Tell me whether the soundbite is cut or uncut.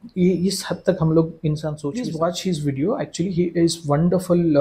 cut